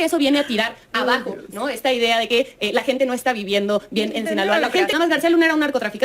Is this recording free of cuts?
no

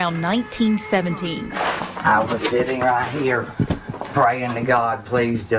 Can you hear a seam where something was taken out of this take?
yes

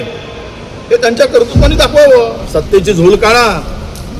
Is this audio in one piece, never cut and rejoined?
no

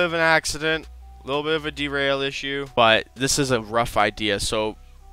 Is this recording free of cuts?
no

